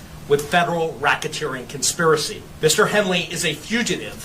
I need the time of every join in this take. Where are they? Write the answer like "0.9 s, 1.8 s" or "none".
2.4 s